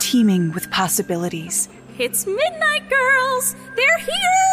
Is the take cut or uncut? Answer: uncut